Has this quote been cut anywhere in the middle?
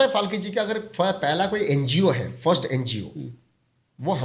no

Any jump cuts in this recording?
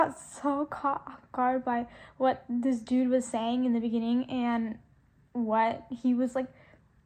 no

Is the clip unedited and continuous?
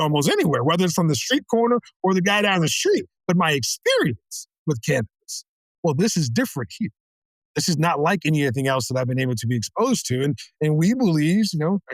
yes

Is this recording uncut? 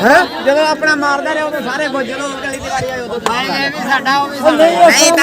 yes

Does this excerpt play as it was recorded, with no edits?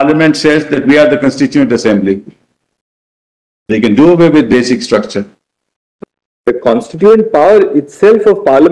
no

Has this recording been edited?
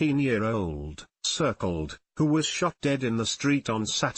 no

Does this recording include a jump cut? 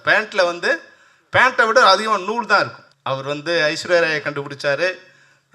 yes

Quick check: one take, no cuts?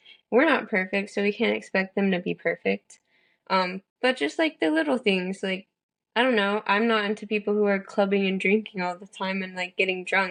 yes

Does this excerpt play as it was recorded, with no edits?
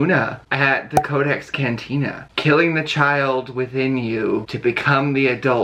yes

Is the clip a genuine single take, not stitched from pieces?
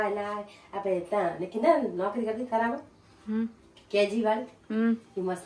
yes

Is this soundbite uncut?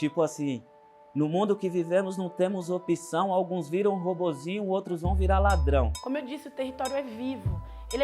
no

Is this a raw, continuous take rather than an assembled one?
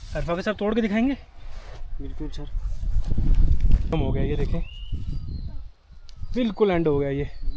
no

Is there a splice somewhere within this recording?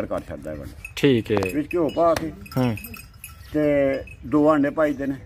yes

